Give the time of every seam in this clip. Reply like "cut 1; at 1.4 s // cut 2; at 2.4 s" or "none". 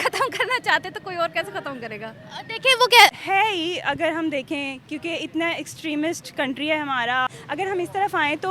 cut 1; at 3.1 s // cut 2; at 7.3 s